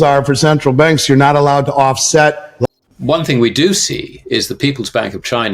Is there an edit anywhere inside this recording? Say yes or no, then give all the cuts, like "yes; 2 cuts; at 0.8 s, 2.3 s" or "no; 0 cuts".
yes; 1 cut; at 2.7 s